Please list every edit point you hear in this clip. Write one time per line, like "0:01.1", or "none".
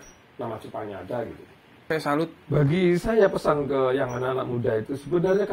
0:01.9